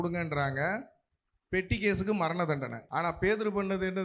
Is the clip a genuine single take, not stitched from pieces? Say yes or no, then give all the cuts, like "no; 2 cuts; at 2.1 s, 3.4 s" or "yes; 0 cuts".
yes; 0 cuts